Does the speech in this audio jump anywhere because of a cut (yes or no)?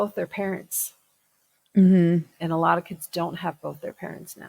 yes